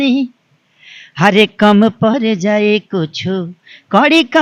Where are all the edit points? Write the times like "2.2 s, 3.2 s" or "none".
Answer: none

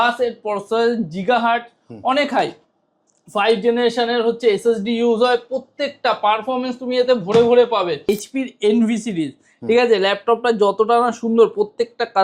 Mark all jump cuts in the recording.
8.1 s

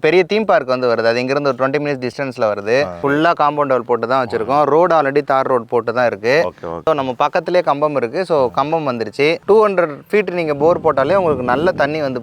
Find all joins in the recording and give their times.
3.0 s, 6.8 s, 9.4 s

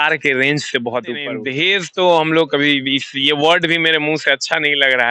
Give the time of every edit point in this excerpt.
1.3 s

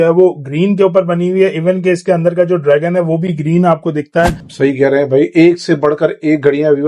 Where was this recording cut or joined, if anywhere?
4.4 s

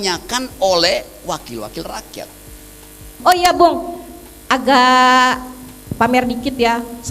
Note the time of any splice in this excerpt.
3.1 s

